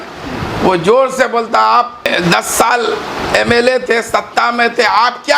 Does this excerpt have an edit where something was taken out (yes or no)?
yes